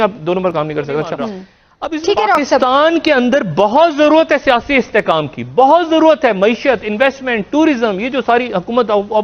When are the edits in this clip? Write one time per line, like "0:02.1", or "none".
none